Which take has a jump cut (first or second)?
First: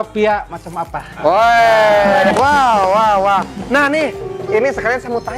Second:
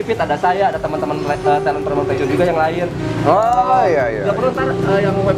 first